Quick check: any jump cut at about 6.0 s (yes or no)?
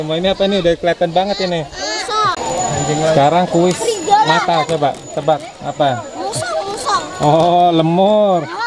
no